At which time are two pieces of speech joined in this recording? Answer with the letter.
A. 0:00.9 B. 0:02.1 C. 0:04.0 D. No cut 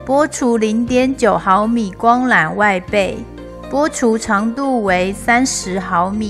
D